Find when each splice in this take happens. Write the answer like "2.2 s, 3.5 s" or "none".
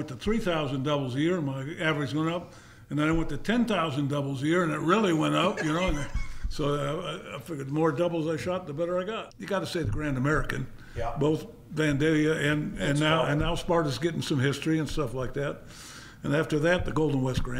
9.3 s